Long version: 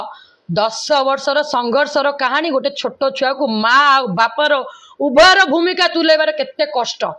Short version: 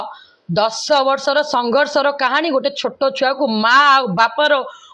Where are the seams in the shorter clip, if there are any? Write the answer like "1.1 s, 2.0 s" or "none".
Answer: none